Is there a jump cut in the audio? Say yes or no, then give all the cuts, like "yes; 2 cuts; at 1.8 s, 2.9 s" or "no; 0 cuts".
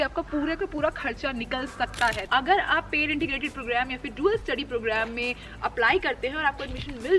yes; 1 cut; at 2.3 s